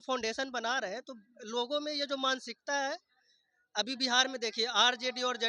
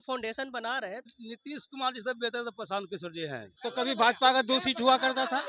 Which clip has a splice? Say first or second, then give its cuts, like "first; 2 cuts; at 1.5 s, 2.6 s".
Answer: second; 2 cuts; at 1.2 s, 3.5 s